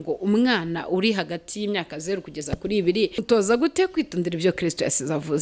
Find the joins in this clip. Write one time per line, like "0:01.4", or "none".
0:03.2